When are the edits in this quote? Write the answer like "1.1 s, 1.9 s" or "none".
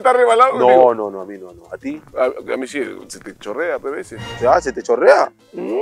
2.1 s